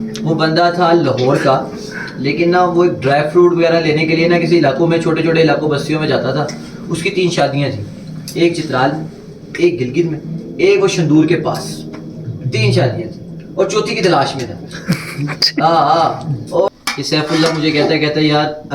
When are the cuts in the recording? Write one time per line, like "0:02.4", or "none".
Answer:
0:16.7